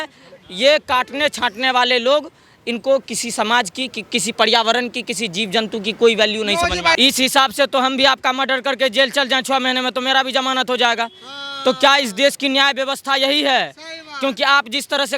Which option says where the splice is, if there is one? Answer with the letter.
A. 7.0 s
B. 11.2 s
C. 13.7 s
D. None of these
A